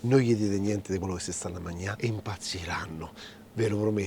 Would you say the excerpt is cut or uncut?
cut